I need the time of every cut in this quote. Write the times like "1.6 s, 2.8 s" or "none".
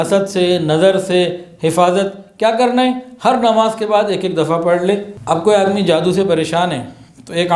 5.1 s